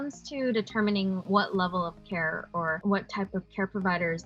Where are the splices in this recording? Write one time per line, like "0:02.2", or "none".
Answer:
0:01.2
0:02.8